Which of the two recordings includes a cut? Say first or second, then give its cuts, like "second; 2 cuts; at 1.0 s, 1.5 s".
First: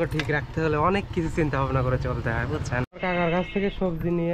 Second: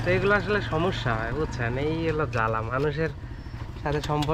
first; 1 cut; at 2.9 s